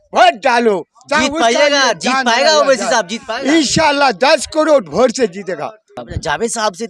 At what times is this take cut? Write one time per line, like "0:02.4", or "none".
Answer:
0:06.0

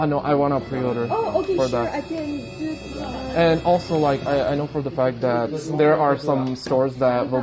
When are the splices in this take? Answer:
0:02.5

